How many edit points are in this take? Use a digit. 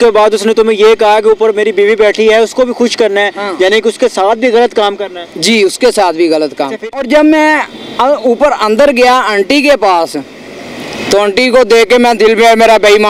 1